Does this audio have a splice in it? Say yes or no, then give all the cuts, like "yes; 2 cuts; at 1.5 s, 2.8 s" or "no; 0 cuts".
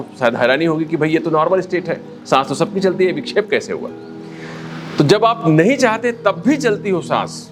no; 0 cuts